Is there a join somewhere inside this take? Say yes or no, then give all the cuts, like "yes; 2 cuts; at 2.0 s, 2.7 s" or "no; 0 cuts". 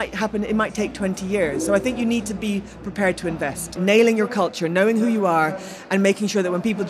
yes; 1 cut; at 3.8 s